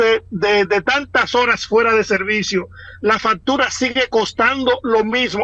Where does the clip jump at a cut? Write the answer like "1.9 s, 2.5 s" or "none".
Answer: none